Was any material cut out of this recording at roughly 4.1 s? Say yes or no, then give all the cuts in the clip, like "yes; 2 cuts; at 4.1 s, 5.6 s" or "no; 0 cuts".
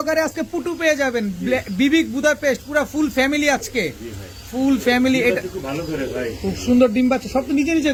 no; 0 cuts